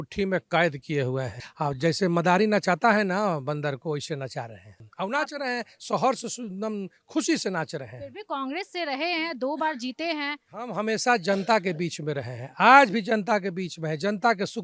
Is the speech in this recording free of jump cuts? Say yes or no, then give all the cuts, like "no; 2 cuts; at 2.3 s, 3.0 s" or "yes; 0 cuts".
yes; 0 cuts